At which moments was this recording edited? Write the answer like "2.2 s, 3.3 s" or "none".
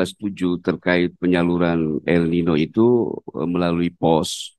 none

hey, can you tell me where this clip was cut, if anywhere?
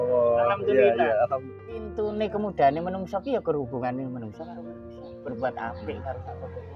1.5 s

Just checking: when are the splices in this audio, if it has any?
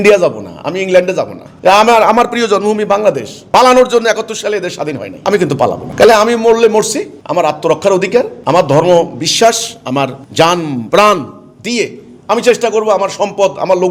none

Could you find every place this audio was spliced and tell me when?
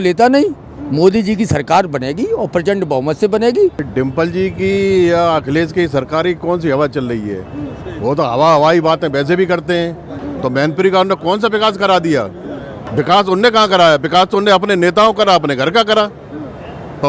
3.8 s, 10.2 s, 12.9 s

